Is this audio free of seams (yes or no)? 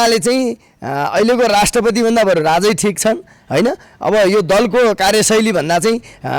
yes